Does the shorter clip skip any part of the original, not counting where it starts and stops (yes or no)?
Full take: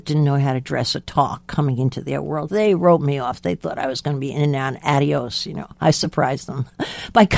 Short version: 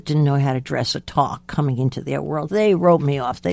no